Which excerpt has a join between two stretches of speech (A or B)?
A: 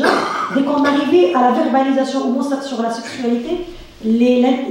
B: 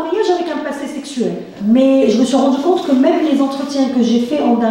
B